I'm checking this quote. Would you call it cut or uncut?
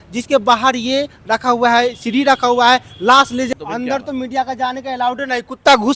cut